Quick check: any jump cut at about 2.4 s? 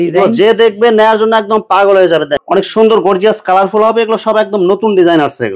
yes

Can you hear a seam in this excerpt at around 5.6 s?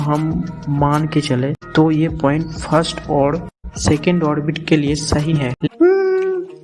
yes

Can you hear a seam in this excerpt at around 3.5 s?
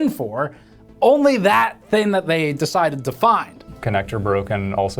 yes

